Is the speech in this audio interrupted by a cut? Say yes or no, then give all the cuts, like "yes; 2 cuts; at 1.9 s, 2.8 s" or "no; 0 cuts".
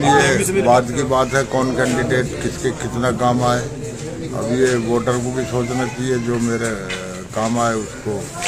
no; 0 cuts